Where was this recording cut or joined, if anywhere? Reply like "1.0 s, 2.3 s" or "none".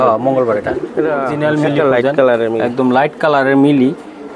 0.9 s